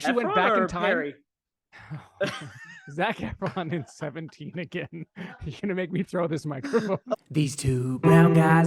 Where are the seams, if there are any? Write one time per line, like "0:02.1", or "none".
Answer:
0:07.1